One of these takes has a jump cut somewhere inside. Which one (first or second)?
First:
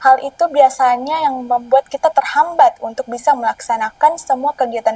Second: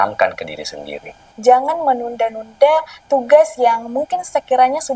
second